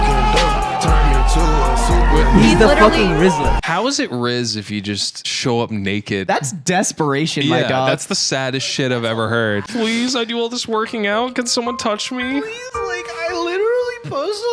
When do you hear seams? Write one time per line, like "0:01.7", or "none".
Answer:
0:03.6